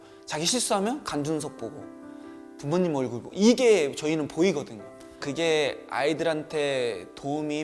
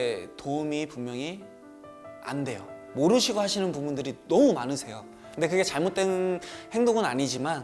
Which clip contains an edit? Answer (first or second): second